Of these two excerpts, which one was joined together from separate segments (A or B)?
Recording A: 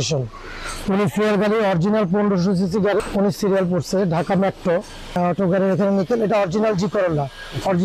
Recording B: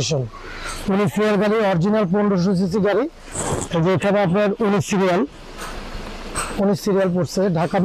A